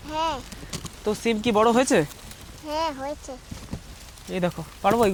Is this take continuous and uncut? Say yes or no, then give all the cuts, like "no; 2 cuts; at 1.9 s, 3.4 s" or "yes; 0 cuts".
yes; 0 cuts